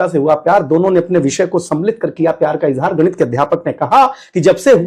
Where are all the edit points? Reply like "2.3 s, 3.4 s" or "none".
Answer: none